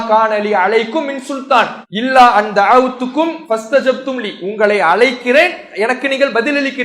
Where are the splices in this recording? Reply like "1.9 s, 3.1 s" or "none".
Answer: 1.8 s, 3.4 s

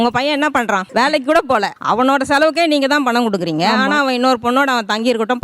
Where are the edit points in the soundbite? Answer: 0.9 s

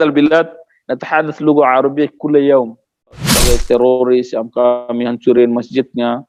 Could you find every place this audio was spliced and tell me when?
3.3 s

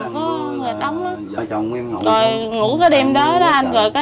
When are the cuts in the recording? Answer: none

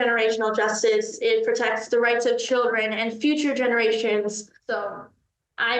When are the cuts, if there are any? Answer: 4.5 s

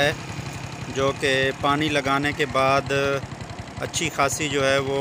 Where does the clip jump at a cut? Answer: none

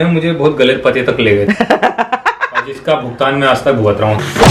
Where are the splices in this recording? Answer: none

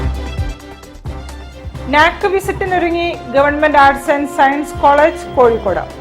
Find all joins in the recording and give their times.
1.3 s

